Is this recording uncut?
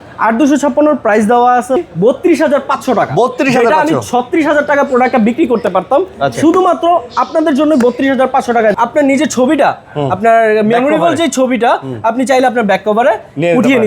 no; 2 cuts; at 1.8 s, 8.7 s

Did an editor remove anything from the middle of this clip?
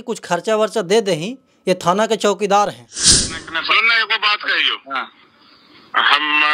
yes; 1 cut; at 3.1 s

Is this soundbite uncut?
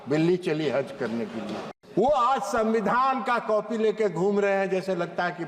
no; 1 cut; at 1.7 s

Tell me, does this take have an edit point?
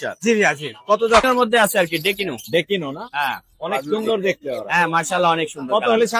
yes; 1 cut; at 1.2 s

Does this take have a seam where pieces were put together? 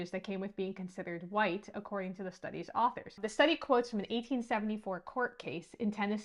yes; 1 cut; at 3.3 s

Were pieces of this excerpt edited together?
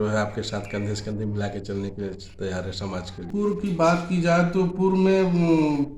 yes; 1 cut; at 3.3 s

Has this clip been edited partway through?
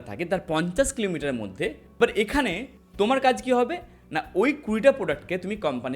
yes; 1 cut; at 1.8 s

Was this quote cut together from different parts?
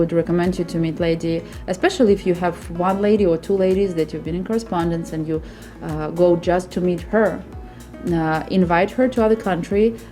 no; 0 cuts

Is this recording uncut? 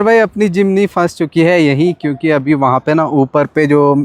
yes; 0 cuts

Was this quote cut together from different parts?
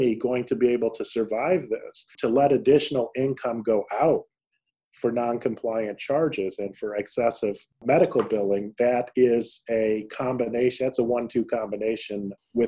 yes; 1 cut; at 2.1 s

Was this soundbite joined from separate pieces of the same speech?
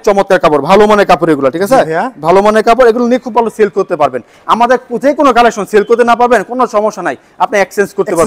no; 0 cuts

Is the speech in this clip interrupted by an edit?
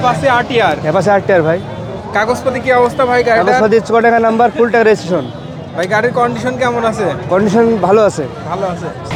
no; 0 cuts

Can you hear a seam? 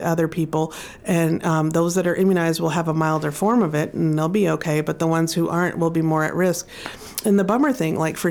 no; 0 cuts

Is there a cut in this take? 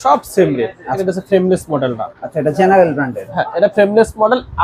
yes; 1 cut; at 1.0 s

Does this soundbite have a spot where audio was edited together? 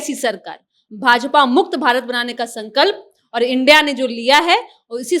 no; 0 cuts

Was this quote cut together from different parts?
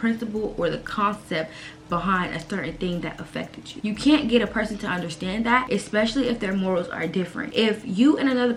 no; 0 cuts

